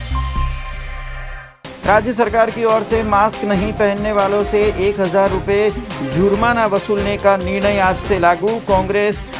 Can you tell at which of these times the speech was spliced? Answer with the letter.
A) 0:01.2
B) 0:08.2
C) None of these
A